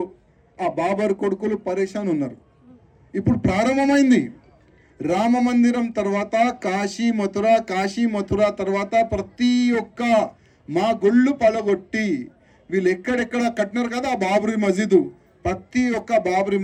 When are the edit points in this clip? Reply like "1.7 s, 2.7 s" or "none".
none